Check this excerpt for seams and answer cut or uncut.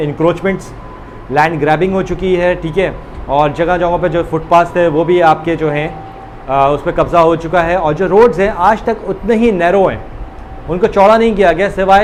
uncut